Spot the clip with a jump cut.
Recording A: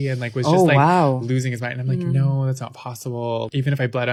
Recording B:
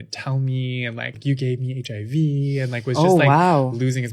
B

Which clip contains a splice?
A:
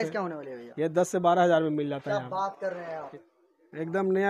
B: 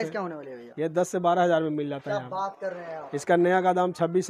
A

